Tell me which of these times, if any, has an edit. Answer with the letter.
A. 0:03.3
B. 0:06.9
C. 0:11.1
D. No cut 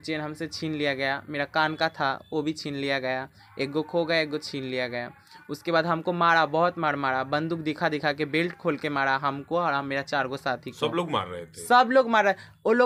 D